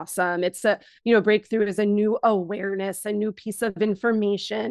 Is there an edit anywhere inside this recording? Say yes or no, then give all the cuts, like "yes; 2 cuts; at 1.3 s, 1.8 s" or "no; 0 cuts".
no; 0 cuts